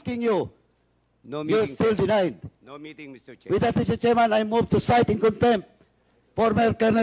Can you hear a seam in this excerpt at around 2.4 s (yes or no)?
no